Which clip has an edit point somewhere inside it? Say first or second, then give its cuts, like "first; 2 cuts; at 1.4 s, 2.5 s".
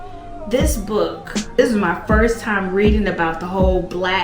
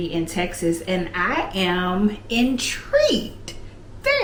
first; 1 cut; at 1.6 s